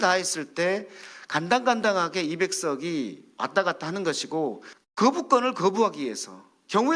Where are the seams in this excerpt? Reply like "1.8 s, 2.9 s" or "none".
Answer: 4.7 s